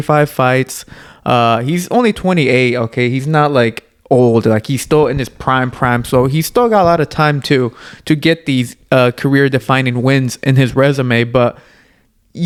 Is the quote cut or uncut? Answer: uncut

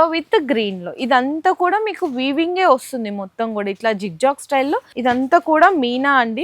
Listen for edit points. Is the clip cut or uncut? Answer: cut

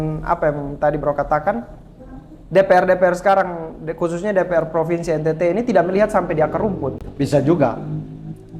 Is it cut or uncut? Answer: uncut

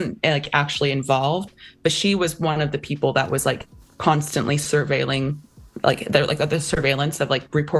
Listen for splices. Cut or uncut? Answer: uncut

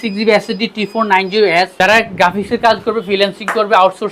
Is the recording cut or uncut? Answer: cut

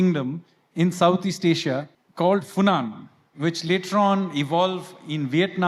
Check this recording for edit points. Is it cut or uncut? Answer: cut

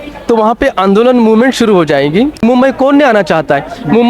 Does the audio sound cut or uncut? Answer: cut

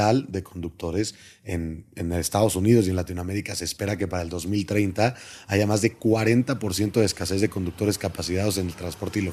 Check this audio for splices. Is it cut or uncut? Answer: uncut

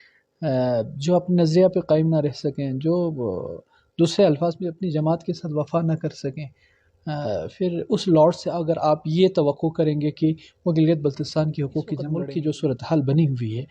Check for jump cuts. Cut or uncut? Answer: cut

